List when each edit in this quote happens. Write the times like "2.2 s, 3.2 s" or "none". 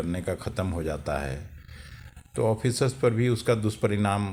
none